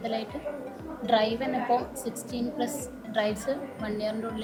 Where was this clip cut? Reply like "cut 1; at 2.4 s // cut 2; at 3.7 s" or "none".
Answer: none